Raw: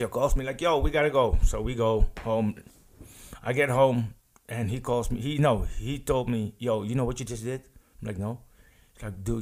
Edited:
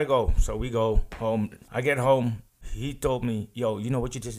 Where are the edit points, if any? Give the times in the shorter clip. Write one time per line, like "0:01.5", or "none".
0:01.6
0:02.7